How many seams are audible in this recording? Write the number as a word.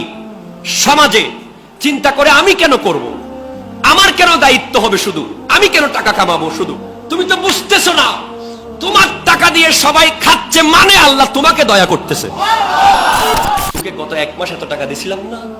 one